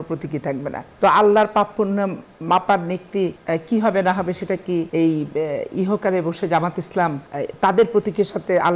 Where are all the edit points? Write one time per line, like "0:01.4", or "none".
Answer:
0:00.9
0:03.4
0:04.9
0:07.3